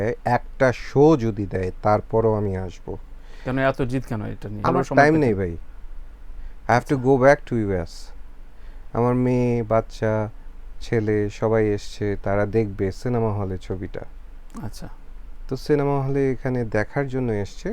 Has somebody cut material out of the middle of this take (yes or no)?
yes